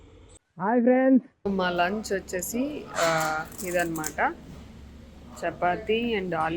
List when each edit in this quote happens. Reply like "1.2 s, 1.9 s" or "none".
1.3 s